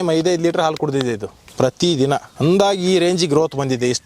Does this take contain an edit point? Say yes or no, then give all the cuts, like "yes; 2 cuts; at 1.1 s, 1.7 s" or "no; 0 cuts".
yes; 2 cuts; at 1.4 s, 2.3 s